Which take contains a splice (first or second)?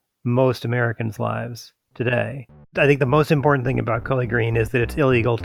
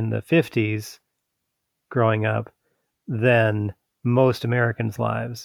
first